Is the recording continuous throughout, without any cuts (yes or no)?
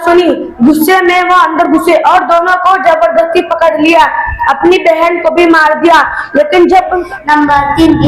no